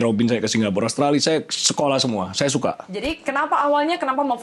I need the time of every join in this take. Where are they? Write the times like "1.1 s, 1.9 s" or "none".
3.0 s